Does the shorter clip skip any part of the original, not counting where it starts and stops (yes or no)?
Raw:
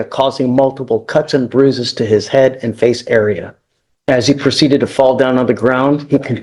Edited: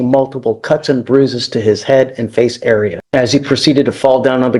yes